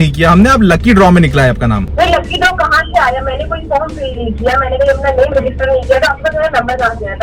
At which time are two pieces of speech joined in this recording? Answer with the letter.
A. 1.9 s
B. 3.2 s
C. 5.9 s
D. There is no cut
A